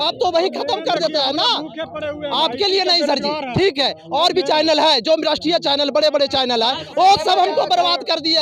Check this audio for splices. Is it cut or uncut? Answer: uncut